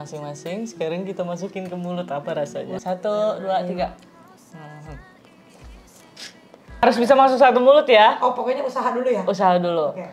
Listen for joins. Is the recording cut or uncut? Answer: cut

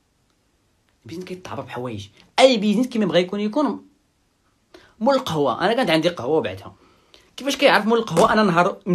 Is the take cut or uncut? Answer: uncut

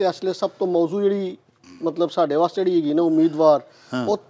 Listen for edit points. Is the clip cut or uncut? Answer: uncut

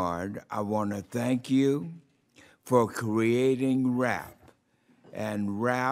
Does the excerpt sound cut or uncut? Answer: cut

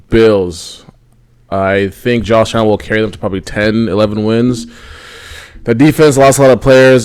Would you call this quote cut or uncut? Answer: uncut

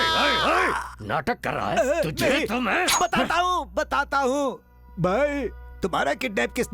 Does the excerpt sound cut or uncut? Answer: uncut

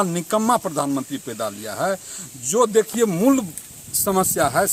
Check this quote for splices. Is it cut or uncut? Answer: uncut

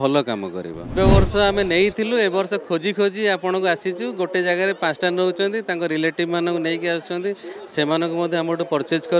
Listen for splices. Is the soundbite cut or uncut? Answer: cut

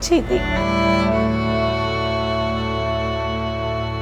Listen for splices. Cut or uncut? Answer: uncut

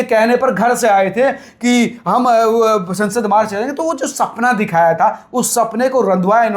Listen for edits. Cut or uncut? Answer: uncut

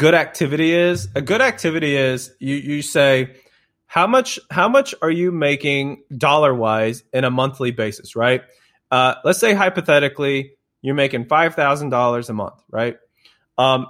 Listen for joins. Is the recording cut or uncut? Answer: uncut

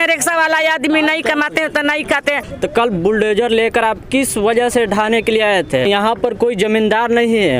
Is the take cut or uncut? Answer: cut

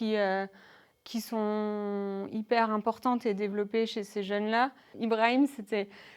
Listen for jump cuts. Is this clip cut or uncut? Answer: cut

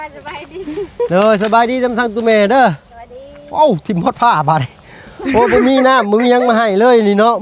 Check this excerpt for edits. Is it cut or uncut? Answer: uncut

